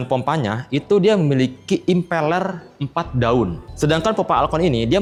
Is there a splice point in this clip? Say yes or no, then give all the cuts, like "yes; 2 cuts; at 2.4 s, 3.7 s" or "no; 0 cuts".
no; 0 cuts